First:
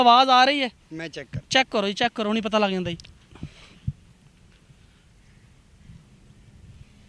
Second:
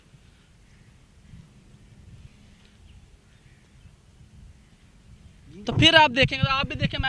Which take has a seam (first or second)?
second